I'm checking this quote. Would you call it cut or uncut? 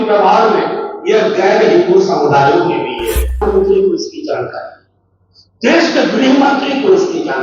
cut